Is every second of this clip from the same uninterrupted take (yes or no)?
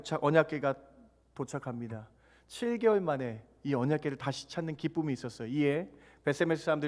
yes